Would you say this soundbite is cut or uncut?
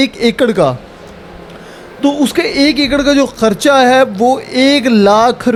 uncut